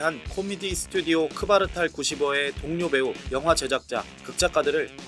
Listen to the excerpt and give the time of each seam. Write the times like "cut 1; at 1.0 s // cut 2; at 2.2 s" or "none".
none